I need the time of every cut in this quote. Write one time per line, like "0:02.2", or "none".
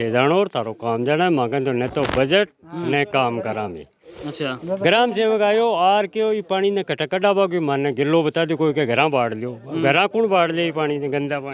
none